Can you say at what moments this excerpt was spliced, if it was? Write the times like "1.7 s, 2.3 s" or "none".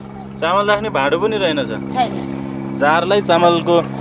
none